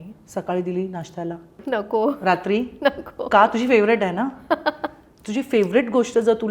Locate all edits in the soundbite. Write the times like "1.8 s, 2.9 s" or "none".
1.6 s